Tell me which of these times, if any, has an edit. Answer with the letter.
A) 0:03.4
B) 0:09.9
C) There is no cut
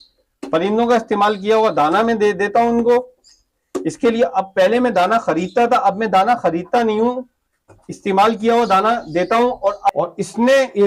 B